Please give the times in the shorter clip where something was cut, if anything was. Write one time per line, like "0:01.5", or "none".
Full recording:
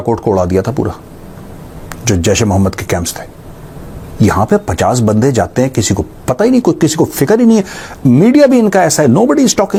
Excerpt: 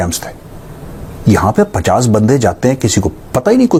none